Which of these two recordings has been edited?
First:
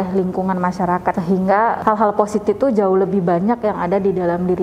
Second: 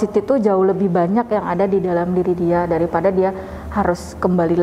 first; 1 cut; at 1.2 s

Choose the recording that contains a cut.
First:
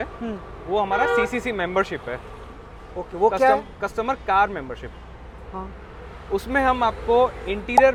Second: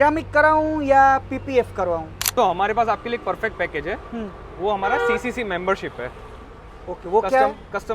second; 1 cut; at 2.2 s

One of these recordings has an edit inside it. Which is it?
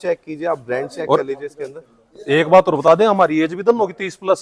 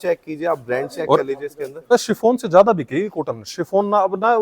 second; 1 cut; at 1.9 s

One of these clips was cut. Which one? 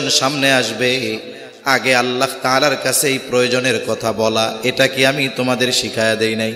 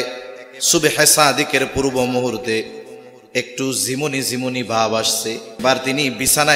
second; 1 cut; at 5.6 s

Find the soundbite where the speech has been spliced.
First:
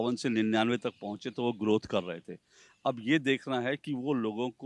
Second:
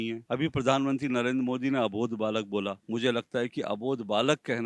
second; 1 cut; at 2.8 s

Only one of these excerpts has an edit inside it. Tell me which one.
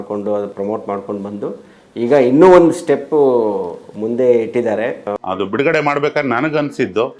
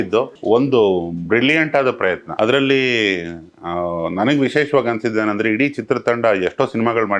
first; 1 cut; at 5.1 s

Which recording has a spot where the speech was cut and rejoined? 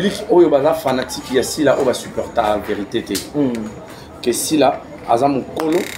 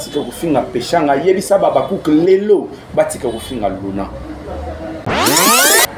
second; 1 cut; at 4.9 s

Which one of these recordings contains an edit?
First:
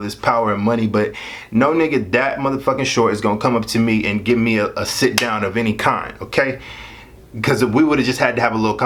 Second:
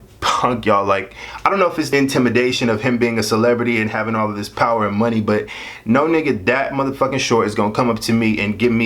second; 1 cut; at 1.9 s

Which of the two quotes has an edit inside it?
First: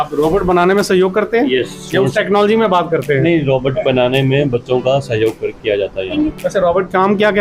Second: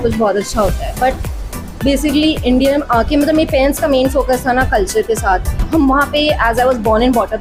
first; 1 cut; at 6.1 s

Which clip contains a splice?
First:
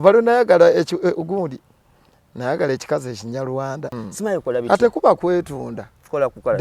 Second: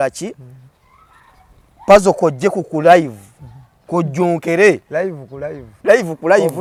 first; 1 cut; at 4.0 s

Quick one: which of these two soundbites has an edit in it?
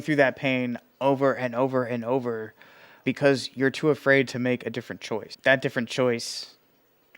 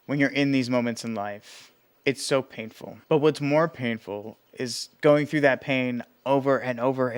first; 2 cuts; at 3.0 s, 5.3 s

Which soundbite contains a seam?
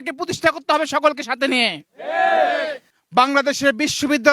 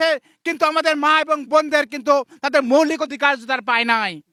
first; 1 cut; at 2.8 s

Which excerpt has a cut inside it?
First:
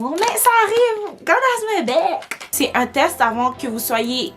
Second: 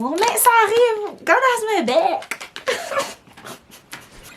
first; 1 cut; at 2.4 s

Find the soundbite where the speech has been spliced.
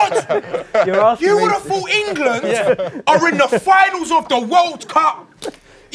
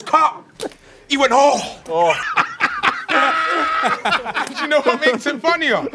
second; 2 cuts; at 2.3 s, 4.5 s

